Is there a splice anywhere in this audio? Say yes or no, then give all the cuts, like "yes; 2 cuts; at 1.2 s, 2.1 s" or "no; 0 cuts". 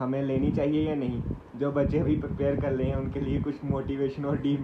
no; 0 cuts